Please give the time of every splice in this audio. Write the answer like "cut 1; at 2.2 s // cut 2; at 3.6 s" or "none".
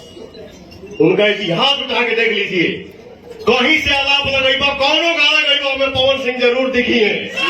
none